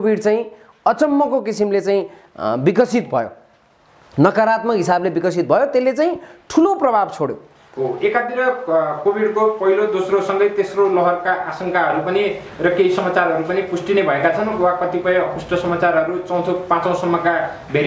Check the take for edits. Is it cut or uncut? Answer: uncut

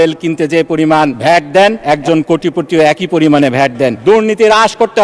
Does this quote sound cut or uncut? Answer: cut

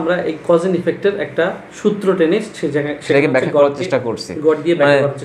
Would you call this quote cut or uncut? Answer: uncut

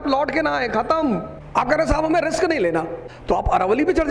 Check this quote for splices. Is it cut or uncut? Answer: cut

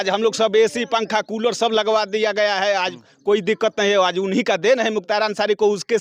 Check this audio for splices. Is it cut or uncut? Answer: uncut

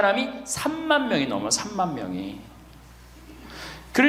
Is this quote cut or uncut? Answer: uncut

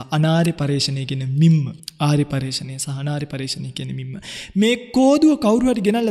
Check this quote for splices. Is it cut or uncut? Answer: cut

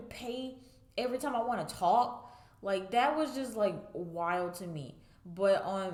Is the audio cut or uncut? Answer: uncut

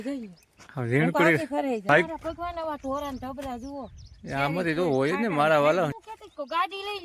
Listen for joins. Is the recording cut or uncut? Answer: cut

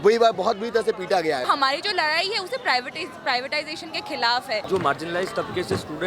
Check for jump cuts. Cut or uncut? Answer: cut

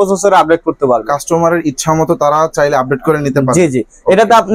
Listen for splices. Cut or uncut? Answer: uncut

